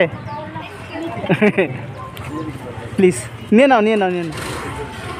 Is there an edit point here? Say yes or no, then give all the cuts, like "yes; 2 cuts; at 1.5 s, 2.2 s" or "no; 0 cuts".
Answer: no; 0 cuts